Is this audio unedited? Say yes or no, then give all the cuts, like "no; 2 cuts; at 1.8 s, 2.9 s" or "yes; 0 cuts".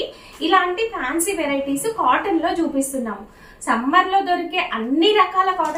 yes; 0 cuts